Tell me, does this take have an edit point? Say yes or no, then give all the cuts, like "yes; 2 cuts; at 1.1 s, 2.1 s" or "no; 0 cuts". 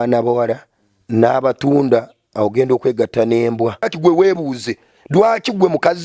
yes; 1 cut; at 3.9 s